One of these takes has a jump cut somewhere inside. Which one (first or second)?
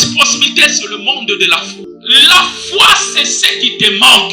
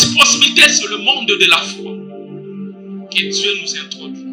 first